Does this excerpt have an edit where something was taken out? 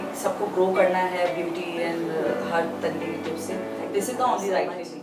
no; 0 cuts

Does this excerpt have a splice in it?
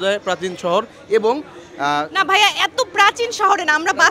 no; 0 cuts

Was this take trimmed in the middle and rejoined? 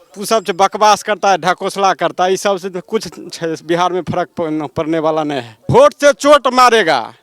yes; 1 cut; at 5.6 s

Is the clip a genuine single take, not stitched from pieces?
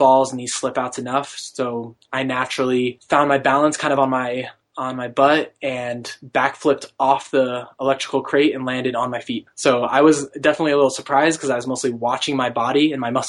no; 2 cuts; at 3.0 s, 9.4 s

